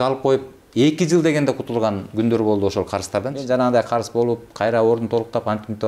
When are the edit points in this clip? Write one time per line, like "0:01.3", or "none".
0:03.4

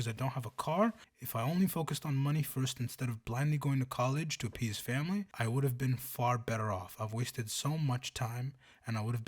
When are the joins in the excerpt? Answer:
0:01.1
0:05.3

